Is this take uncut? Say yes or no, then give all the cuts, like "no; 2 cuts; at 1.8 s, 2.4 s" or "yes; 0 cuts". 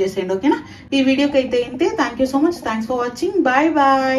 yes; 0 cuts